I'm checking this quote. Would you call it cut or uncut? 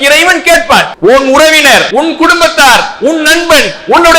cut